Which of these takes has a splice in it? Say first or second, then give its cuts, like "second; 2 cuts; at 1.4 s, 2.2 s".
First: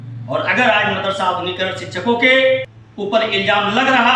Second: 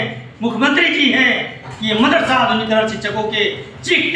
first; 1 cut; at 2.8 s